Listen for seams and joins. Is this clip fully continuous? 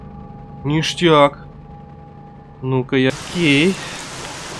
no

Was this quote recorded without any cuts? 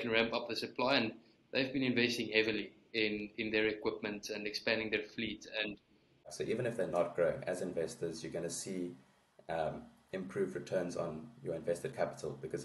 no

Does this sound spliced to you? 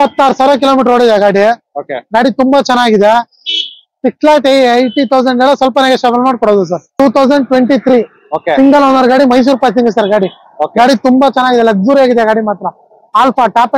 yes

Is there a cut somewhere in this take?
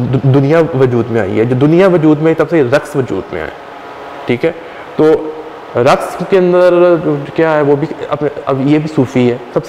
no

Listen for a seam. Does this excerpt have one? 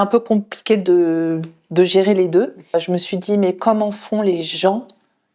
yes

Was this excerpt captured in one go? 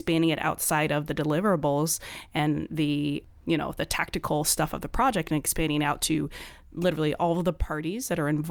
yes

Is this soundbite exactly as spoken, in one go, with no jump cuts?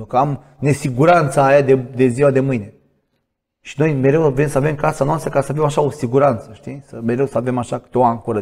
yes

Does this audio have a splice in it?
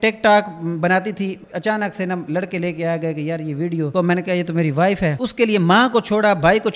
yes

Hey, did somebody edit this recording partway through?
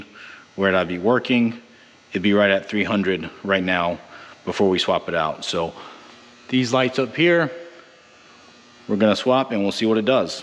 no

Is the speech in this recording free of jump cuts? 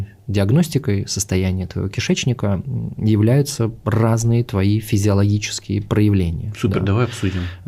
yes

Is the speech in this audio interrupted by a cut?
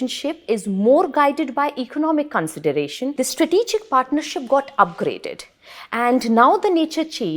yes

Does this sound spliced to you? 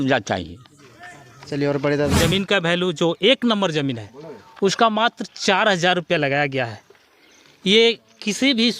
yes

